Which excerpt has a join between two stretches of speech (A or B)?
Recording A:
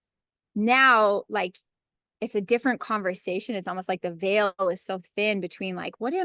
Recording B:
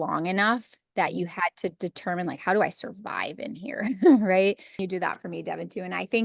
B